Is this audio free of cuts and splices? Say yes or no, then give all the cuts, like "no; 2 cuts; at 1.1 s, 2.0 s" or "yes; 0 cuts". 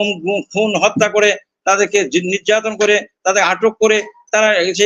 yes; 0 cuts